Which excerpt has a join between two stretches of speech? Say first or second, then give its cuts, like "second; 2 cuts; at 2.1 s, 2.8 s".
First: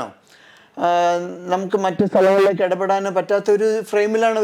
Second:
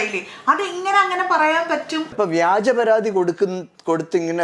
second; 1 cut; at 2.1 s